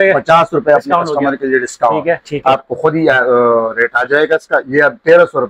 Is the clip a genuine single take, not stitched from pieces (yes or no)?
no